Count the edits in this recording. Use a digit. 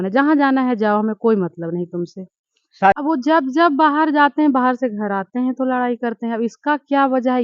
1